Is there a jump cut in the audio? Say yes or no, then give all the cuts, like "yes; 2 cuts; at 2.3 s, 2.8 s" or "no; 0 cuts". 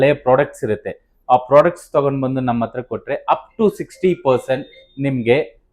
no; 0 cuts